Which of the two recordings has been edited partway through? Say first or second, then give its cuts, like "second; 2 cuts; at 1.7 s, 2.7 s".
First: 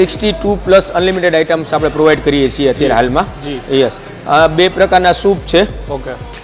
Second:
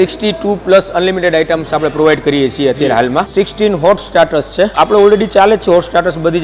second; 2 cuts; at 3.3 s, 4.7 s